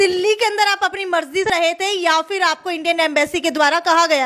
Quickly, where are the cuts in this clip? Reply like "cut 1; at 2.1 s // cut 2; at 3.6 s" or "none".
cut 1; at 1.5 s